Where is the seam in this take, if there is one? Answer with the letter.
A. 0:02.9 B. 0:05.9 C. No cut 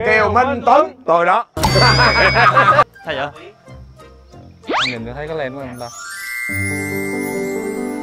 A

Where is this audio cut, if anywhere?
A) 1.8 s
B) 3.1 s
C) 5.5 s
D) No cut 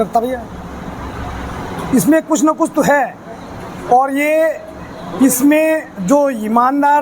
A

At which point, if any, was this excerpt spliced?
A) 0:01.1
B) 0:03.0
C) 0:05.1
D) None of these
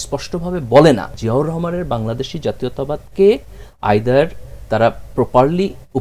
A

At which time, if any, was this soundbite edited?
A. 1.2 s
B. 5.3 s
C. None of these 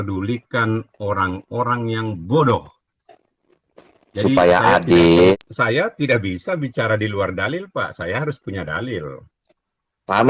B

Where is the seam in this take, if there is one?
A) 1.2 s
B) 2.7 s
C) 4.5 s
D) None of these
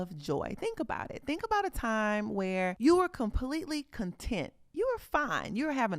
B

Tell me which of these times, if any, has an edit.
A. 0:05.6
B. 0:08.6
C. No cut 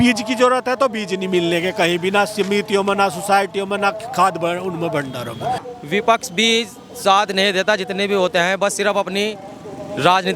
A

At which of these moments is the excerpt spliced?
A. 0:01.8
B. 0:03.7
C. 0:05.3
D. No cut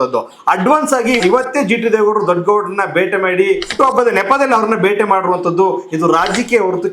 B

